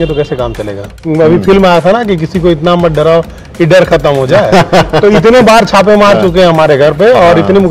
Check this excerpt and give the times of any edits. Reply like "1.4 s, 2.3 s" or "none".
1.0 s